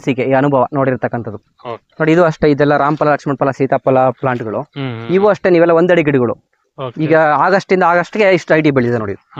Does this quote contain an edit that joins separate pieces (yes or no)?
no